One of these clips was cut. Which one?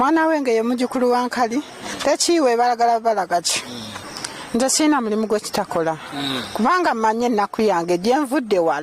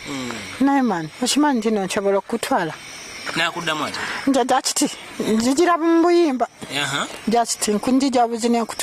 first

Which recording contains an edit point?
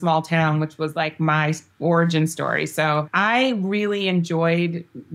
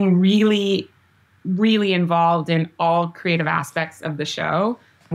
first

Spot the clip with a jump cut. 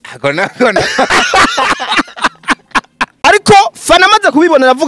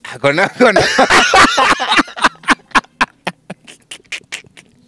first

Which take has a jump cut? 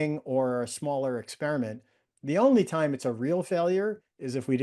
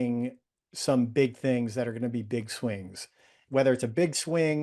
second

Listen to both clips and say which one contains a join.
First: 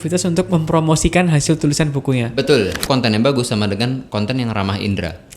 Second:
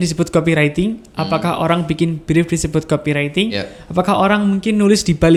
first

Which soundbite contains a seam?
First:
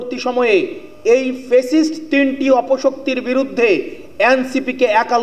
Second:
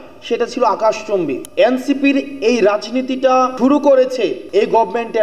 second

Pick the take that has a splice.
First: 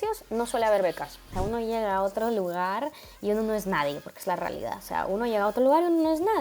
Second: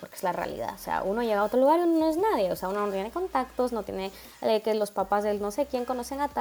first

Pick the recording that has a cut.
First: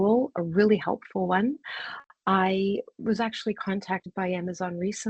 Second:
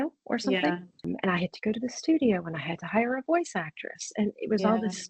second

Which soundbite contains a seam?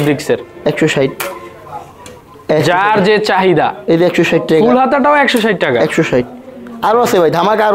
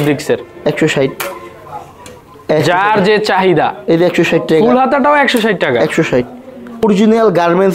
second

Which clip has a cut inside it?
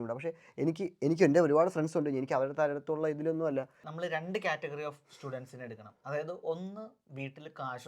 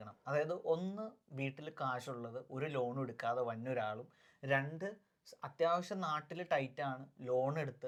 first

